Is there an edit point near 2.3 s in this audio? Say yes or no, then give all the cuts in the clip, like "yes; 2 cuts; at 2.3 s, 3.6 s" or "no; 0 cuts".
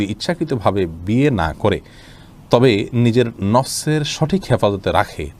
no; 0 cuts